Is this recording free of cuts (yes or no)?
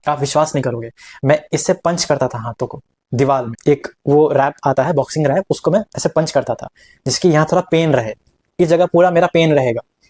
yes